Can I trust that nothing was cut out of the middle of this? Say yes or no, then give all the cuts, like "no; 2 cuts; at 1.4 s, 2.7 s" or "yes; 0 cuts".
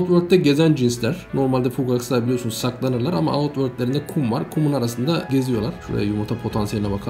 yes; 0 cuts